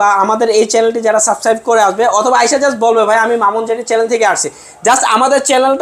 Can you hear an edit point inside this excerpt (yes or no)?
no